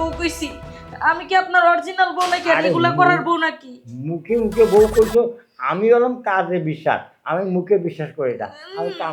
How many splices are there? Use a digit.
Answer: 0